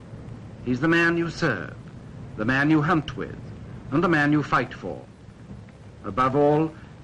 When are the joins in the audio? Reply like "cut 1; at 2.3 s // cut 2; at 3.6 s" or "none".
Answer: cut 1; at 1.8 s

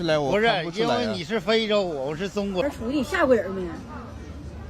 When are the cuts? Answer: cut 1; at 2.6 s

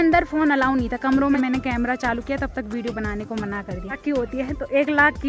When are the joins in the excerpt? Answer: cut 1; at 1.4 s // cut 2; at 4.0 s

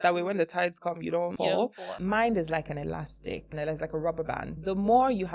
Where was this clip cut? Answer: cut 1; at 1.8 s // cut 2; at 3.5 s // cut 3; at 4.5 s

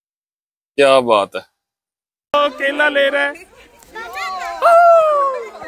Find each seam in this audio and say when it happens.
cut 1; at 2.3 s

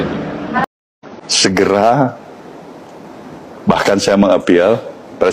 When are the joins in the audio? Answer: cut 1; at 0.9 s

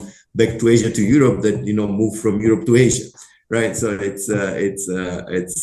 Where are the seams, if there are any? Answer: none

